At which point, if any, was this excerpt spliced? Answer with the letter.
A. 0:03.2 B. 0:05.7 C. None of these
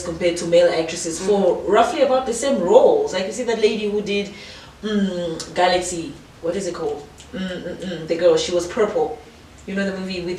C